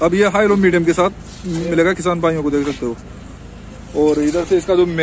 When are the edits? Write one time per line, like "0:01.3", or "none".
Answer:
none